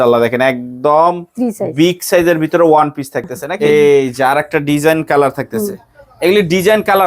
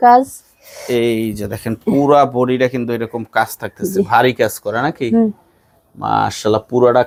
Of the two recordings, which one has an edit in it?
first; 1 cut; at 3.4 s

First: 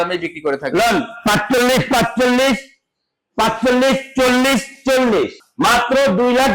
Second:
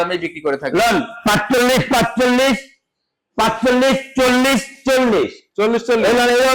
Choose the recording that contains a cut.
first; 1 cut; at 5.4 s

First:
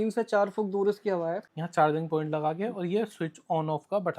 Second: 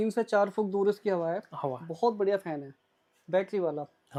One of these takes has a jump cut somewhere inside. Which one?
first; 1 cut; at 1.5 s

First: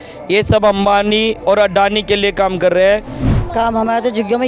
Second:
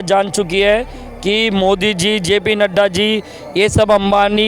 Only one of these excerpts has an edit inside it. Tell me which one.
first; 1 cut; at 3.2 s

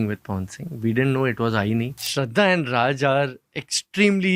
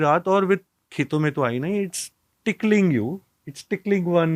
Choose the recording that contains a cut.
first; 1 cut; at 2.0 s

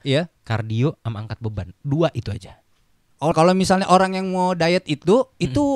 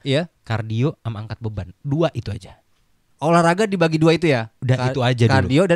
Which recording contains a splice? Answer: first; 1 cut; at 3.3 s

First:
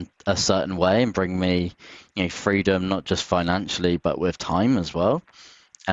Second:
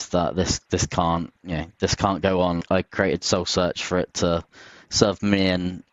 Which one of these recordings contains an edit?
second; 1 cut; at 2.6 s

